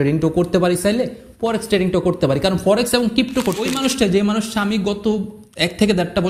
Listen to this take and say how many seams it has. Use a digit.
1